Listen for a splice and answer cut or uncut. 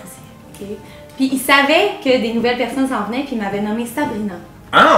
uncut